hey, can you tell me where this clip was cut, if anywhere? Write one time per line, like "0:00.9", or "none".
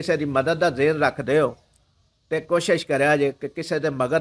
none

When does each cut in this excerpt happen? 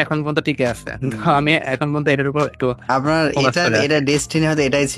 none

